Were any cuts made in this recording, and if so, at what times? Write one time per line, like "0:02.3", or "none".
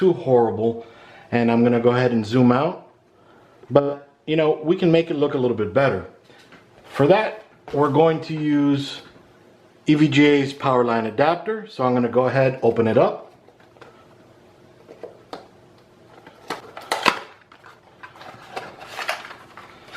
0:16.6